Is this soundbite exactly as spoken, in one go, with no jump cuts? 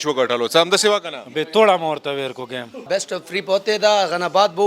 no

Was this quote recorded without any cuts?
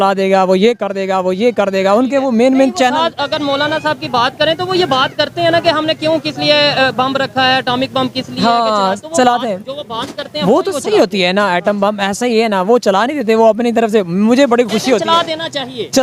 yes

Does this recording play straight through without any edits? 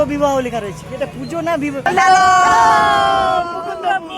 no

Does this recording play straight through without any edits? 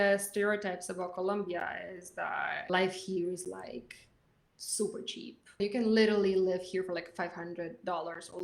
no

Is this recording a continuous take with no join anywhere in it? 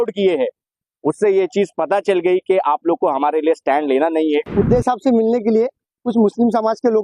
no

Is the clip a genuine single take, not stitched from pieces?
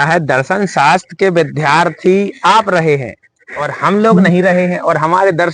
yes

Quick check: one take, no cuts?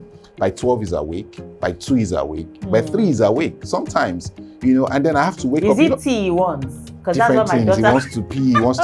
yes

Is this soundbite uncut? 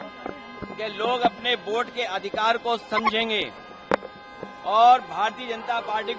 yes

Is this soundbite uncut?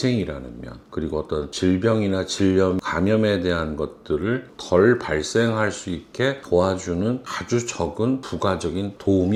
yes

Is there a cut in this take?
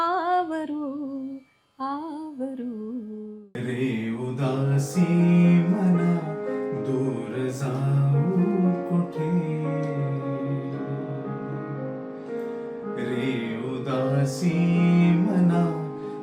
yes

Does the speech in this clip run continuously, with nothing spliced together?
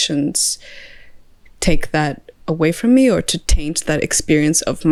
yes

